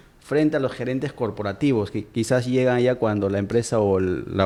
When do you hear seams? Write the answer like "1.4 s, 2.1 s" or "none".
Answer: none